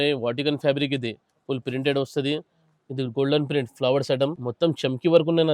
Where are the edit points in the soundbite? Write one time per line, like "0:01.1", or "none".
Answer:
0:04.4